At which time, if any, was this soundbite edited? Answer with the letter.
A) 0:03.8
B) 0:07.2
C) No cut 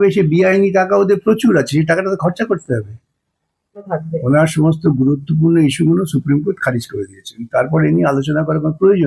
A